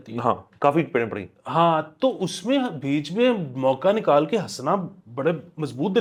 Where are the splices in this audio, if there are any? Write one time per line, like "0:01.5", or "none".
none